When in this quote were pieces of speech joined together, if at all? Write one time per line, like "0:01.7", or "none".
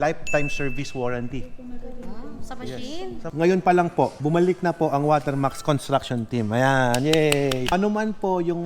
0:03.3
0:07.7